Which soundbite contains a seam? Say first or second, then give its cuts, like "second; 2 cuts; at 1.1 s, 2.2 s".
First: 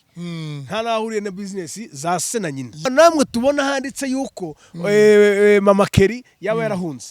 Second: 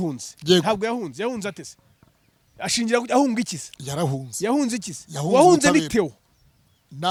first; 1 cut; at 2.9 s